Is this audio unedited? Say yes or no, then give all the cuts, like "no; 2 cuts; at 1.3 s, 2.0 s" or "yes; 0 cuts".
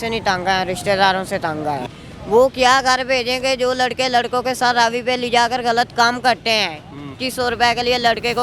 no; 2 cuts; at 1.9 s, 7.2 s